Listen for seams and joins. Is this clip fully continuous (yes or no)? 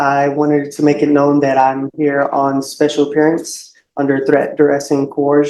yes